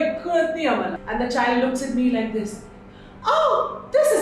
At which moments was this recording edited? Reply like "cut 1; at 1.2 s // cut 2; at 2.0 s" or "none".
cut 1; at 1.0 s